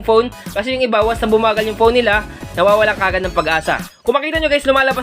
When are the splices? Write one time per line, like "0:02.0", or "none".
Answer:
0:03.8